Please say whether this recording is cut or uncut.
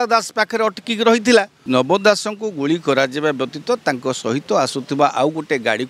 cut